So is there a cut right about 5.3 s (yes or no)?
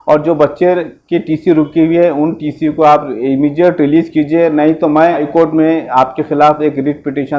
yes